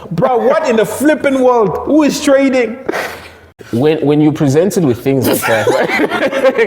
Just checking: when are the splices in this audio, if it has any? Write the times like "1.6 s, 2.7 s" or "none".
3.6 s

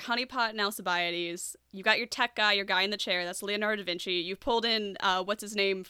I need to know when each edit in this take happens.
none

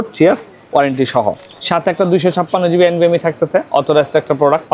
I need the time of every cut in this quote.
1.4 s

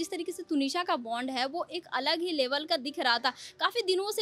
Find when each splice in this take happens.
none

